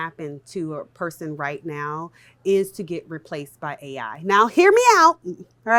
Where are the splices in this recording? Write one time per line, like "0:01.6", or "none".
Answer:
none